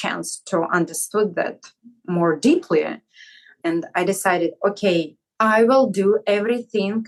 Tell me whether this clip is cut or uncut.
uncut